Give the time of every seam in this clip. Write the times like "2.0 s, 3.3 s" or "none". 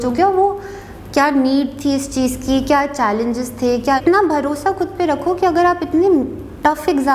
4.0 s